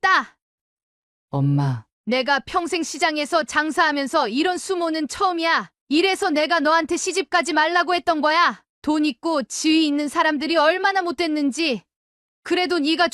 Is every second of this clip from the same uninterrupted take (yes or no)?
yes